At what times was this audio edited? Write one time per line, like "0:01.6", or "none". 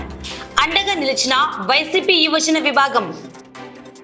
none